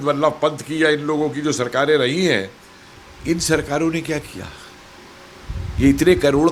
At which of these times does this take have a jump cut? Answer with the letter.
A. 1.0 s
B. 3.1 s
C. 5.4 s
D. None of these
D